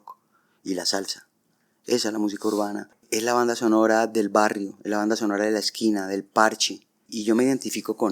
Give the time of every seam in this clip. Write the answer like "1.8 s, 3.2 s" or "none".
3.0 s, 7.1 s